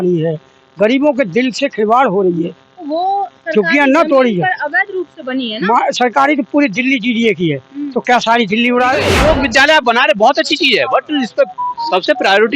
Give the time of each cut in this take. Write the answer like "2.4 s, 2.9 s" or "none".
9.1 s